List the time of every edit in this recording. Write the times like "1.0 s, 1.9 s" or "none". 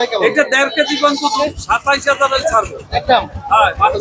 1.4 s